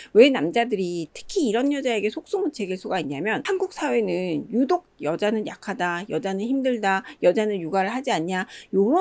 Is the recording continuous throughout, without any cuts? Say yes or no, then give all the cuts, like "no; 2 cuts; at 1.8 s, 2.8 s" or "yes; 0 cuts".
no; 1 cut; at 3.4 s